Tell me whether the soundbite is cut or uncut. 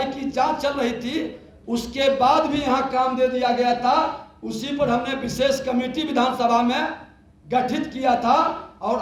uncut